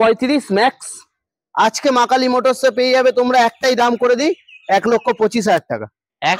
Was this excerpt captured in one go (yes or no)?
yes